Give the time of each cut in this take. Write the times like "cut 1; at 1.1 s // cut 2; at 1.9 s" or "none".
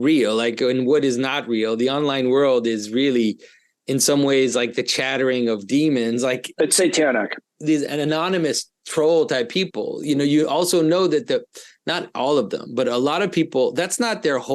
cut 1; at 6.5 s // cut 2; at 7.5 s